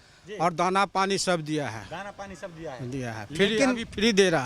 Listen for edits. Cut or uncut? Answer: uncut